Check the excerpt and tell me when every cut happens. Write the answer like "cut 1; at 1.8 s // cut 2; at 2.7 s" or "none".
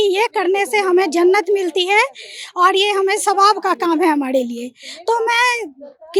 none